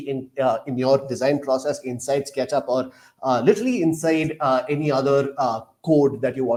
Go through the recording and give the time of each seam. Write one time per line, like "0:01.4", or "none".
none